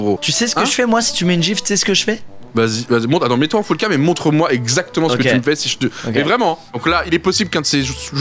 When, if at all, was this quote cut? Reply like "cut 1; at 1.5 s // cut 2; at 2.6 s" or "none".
cut 1; at 6.7 s